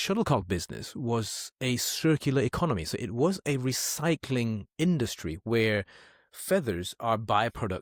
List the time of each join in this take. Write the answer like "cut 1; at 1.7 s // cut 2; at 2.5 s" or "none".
none